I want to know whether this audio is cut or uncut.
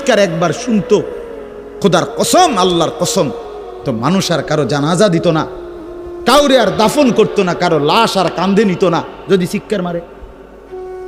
uncut